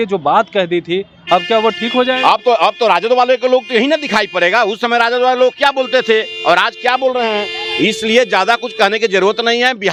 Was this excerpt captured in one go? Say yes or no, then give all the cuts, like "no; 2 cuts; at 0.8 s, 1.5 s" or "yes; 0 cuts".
yes; 0 cuts